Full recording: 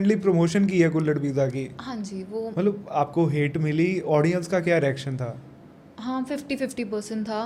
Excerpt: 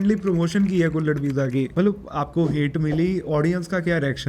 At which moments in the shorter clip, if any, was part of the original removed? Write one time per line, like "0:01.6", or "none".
0:01.7